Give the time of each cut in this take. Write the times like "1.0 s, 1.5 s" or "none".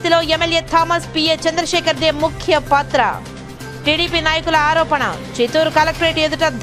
none